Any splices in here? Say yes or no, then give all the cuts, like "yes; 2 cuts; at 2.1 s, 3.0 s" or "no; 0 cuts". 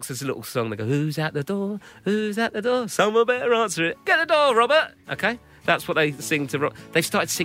no; 0 cuts